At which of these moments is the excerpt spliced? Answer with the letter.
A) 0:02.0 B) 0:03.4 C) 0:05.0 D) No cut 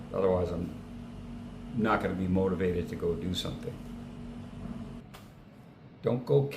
C